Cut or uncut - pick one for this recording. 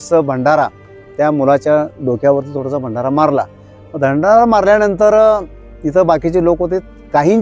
uncut